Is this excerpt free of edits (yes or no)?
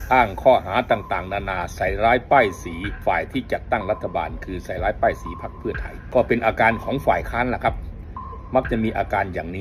no